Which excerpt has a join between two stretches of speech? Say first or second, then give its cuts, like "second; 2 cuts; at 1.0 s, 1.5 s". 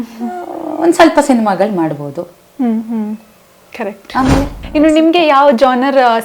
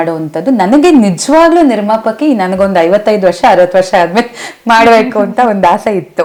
first; 1 cut; at 4.6 s